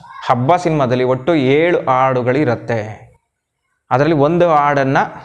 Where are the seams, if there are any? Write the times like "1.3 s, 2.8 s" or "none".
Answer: none